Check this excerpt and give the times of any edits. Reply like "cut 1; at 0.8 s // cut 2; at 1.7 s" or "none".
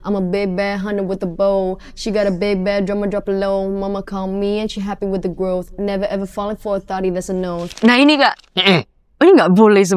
cut 1; at 7.7 s